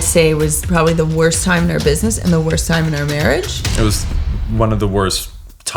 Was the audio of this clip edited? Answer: no; 0 cuts

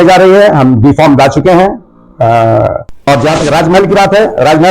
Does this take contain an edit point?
yes; 1 cut; at 3.1 s

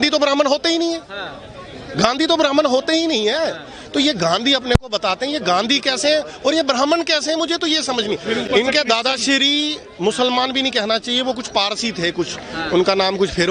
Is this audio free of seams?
yes; 0 cuts

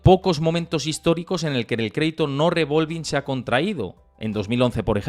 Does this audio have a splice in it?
no; 0 cuts

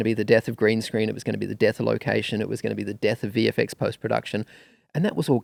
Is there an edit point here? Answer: no; 0 cuts

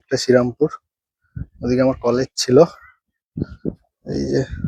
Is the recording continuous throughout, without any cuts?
yes; 0 cuts

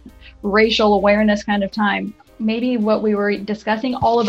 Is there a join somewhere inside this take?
yes; 1 cut; at 2.3 s

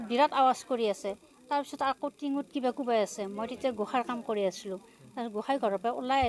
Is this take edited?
no; 0 cuts

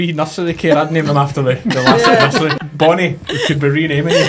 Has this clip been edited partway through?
yes; 1 cut; at 2.6 s

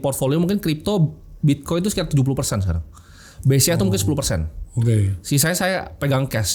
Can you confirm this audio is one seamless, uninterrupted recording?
yes; 0 cuts

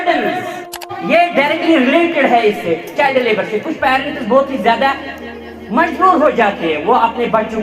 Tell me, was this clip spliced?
yes; 1 cut; at 0.9 s

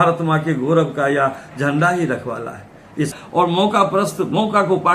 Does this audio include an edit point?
yes; 1 cut; at 3.1 s

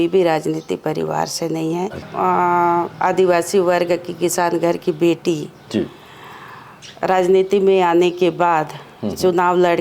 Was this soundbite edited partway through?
yes; 1 cut; at 2.1 s

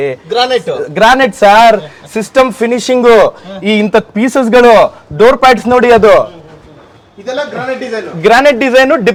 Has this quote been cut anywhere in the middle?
no; 0 cuts

